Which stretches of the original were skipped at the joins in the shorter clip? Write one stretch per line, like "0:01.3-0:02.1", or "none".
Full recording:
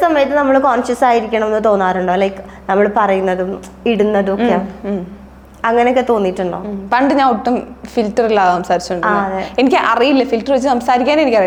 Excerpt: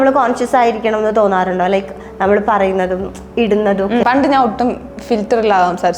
0:04.5-0:06.9